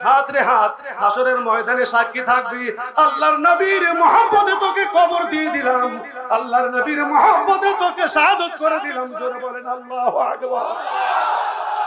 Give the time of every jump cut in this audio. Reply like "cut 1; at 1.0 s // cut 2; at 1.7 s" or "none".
none